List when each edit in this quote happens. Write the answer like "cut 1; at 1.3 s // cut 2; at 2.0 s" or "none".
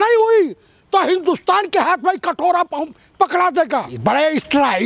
cut 1; at 3.9 s